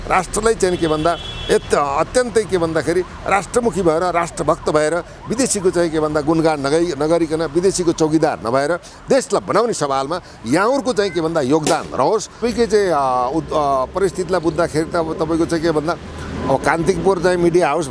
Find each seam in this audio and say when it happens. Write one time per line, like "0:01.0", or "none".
0:12.4